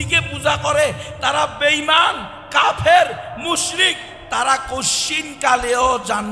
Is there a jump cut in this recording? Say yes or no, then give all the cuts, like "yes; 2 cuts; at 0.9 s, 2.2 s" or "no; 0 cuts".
no; 0 cuts